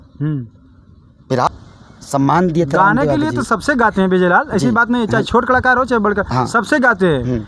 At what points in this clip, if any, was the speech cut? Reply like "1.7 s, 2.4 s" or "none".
1.5 s

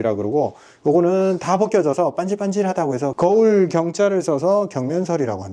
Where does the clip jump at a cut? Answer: none

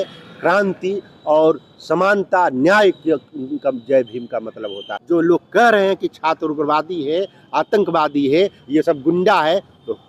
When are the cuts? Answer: 4.9 s

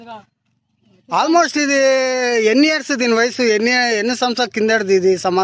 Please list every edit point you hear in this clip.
none

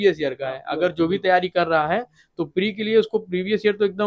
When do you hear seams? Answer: none

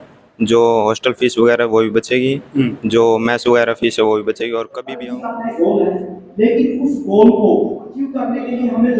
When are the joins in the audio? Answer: 4.7 s, 8.2 s

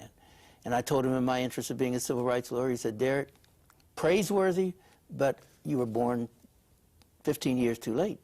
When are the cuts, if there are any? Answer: 5.9 s

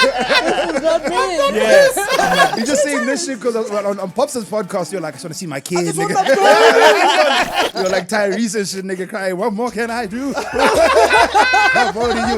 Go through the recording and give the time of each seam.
2.6 s, 7.7 s

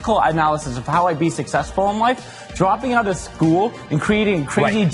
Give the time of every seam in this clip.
none

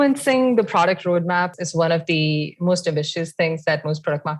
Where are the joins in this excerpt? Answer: none

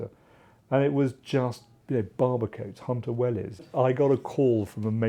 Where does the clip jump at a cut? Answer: 3.7 s

